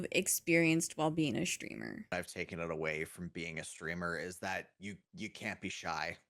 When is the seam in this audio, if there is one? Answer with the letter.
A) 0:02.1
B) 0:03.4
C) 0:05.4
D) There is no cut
A